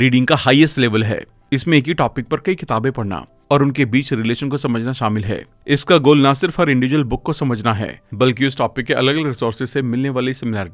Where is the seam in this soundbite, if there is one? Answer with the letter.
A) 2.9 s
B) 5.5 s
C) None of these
C